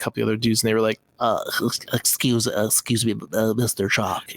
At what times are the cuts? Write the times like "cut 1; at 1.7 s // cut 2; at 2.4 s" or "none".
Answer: cut 1; at 1.1 s

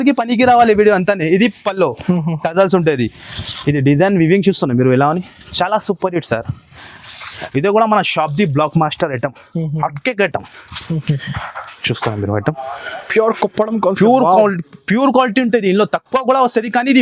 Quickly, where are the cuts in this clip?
cut 1; at 7.4 s

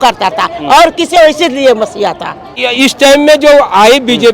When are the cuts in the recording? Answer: cut 1; at 2.6 s

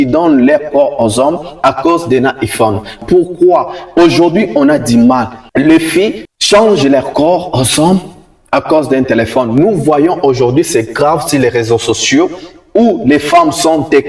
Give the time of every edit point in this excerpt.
cut 1; at 2.9 s

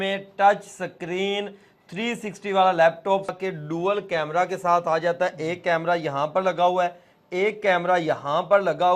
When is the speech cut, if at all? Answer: cut 1; at 3.4 s

